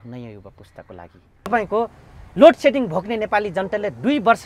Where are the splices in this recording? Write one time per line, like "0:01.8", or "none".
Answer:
0:01.5